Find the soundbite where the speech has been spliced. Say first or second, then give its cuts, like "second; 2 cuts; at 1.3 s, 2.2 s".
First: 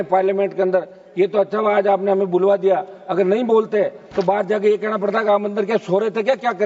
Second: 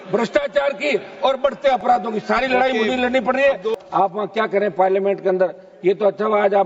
second; 1 cut; at 3.7 s